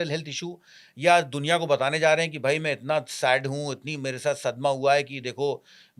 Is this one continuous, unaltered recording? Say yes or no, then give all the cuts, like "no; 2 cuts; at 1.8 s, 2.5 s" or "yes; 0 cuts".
yes; 0 cuts